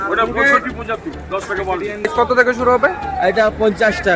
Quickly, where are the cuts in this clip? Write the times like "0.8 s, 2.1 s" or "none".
2.0 s